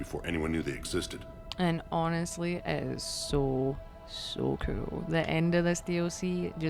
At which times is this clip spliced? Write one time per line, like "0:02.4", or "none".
none

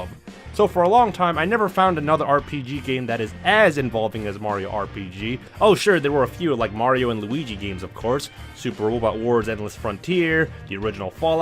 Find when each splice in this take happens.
0:10.4

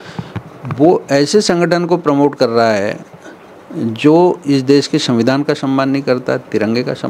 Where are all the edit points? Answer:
none

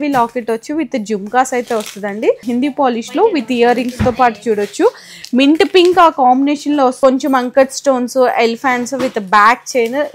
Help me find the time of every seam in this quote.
0:02.4
0:07.0

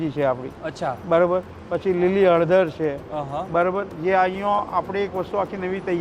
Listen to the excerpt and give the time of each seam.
none

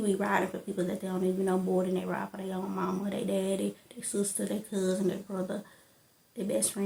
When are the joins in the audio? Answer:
none

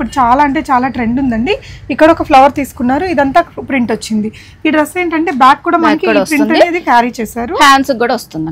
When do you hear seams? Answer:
none

